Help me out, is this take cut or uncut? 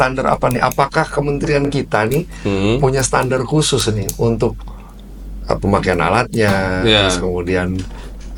uncut